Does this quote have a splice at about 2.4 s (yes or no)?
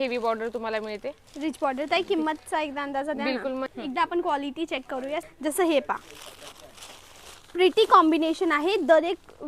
no